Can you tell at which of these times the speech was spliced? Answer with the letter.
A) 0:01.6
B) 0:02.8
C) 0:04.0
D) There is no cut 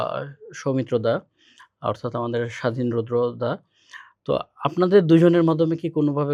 D